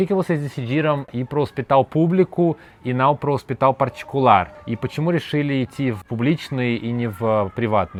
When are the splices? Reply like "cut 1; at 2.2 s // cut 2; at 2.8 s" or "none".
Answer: none